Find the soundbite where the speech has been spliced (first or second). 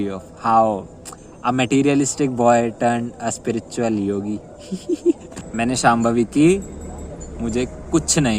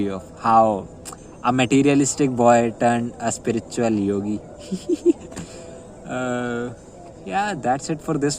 first